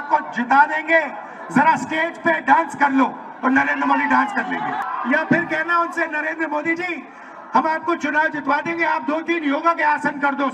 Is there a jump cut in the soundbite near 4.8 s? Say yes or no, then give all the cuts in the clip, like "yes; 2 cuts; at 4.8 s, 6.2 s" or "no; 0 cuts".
yes; 1 cut; at 4.8 s